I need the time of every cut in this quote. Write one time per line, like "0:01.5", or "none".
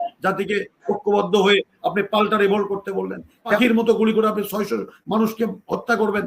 0:03.6

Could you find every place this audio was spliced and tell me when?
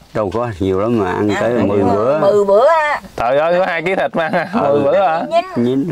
none

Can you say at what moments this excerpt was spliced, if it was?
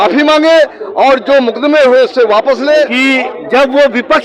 0:03.3

